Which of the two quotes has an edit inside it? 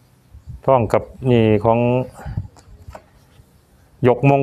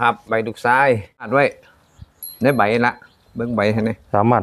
second; 1 cut; at 1.3 s

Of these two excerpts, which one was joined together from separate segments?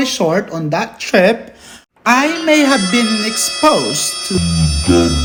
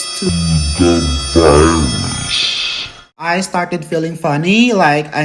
second; 1 cut; at 3.1 s

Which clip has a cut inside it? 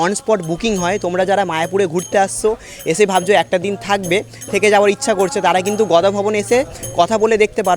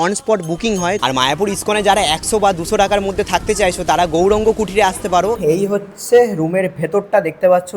second; 2 cuts; at 1.0 s, 5.4 s

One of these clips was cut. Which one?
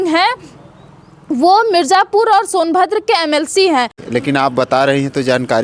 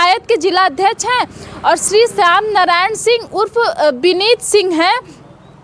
first; 1 cut; at 4.0 s

